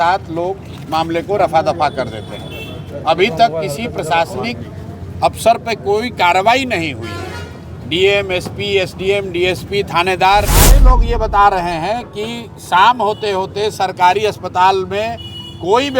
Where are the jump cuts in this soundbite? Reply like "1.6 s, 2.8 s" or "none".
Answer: 10.8 s